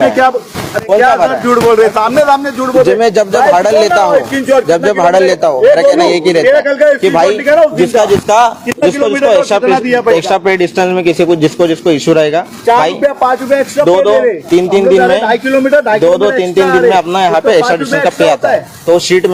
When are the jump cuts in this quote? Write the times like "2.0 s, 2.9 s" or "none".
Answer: none